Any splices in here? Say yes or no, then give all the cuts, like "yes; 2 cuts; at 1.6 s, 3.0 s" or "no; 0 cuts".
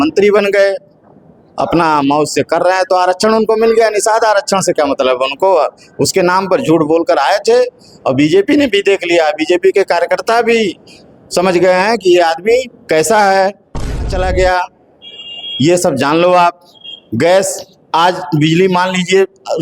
yes; 1 cut; at 14.0 s